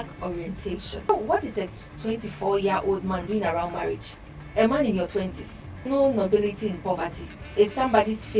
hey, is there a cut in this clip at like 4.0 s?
no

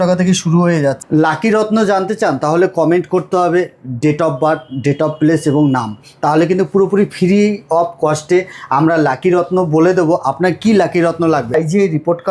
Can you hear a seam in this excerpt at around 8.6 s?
no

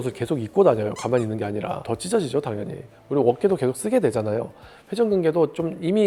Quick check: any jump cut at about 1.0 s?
no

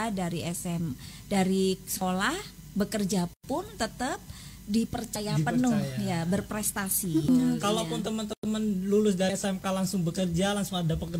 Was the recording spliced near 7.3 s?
yes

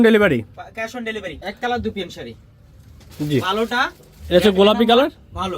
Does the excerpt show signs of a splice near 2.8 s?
no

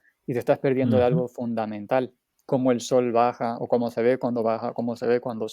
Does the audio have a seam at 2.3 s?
yes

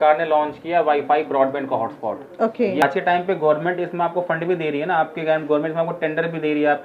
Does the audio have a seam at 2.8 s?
yes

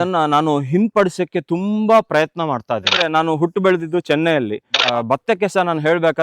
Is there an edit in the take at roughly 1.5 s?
no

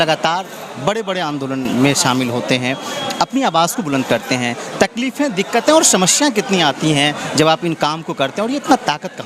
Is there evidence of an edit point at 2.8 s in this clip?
no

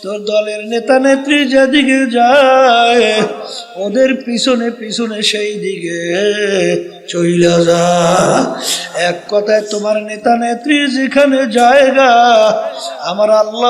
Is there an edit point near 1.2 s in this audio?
no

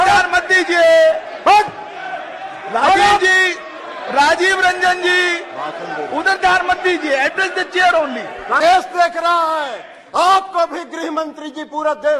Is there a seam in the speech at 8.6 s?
yes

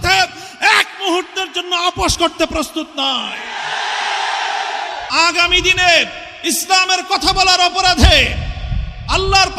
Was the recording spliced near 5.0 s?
yes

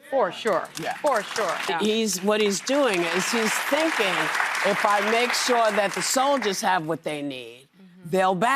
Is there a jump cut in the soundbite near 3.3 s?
no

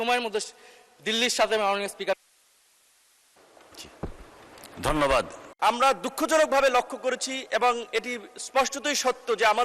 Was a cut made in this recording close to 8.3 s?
no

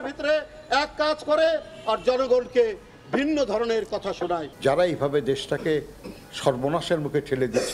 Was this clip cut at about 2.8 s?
no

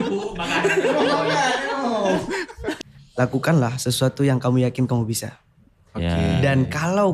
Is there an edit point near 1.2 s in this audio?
no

